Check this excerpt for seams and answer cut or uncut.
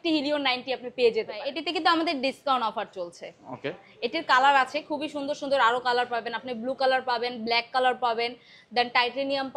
cut